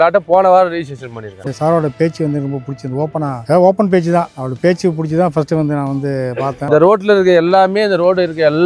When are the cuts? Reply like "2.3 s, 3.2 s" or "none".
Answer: 1.4 s, 6.6 s